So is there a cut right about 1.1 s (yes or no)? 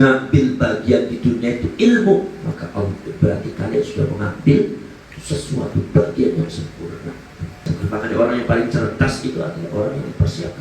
no